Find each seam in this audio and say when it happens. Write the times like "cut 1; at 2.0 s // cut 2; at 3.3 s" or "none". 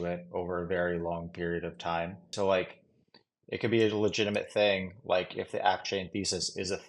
cut 1; at 2.3 s